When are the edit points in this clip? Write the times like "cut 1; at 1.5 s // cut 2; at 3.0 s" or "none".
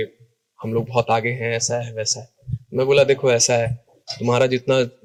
none